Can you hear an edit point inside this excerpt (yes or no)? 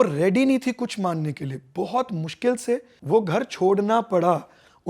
yes